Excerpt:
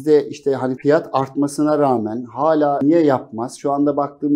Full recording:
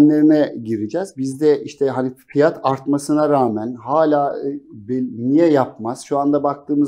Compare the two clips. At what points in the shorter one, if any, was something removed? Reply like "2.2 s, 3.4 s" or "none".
0.8 s, 2.8 s